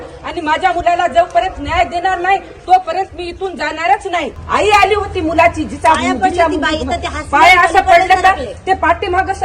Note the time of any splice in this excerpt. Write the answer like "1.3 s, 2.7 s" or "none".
4.4 s